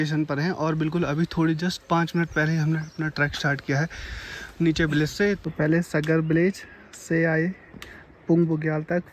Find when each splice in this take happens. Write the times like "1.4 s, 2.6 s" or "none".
5.4 s